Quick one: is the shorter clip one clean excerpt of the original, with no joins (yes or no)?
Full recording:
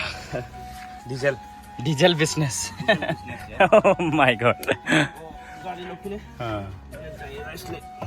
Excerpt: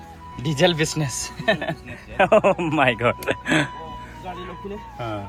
yes